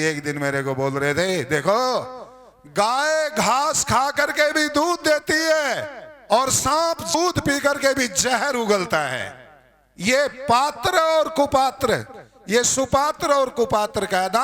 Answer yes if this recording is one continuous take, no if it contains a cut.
no